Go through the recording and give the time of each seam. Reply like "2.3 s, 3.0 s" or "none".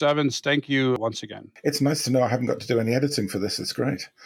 1.0 s

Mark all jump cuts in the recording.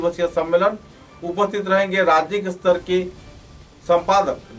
none

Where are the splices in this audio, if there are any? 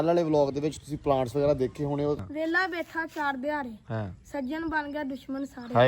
2.2 s

